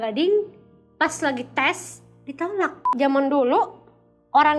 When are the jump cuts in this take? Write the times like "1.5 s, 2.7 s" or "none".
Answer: 2.9 s